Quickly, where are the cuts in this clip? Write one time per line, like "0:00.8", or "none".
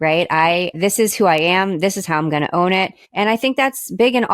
0:00.8
0:03.0